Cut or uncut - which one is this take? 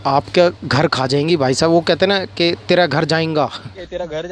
uncut